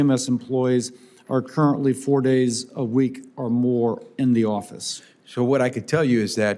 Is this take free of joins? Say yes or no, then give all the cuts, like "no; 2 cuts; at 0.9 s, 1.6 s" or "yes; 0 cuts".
yes; 0 cuts